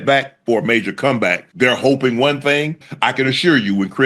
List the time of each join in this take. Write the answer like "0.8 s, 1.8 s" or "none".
1.4 s, 2.9 s

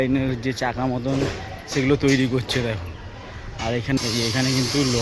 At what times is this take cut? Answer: 4.0 s

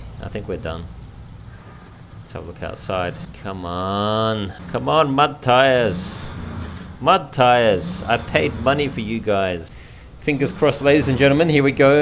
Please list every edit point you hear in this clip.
3.3 s, 4.6 s, 9.7 s

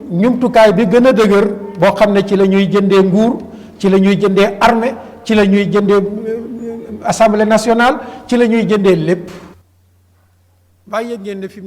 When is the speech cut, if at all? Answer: 9.5 s

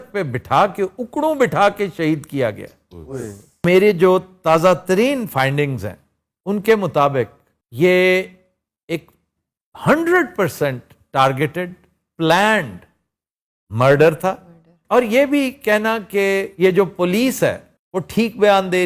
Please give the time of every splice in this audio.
3.6 s

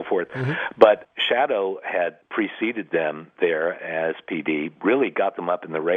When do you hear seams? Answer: 1.0 s, 2.2 s

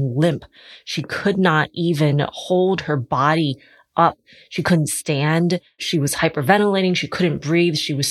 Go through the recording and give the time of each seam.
5.8 s

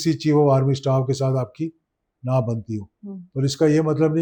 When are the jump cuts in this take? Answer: none

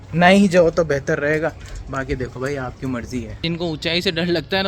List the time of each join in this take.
3.4 s

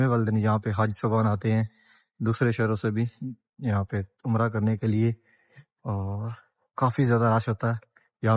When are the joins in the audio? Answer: none

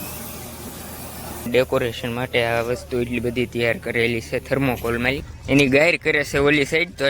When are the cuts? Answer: 1.5 s, 5.3 s

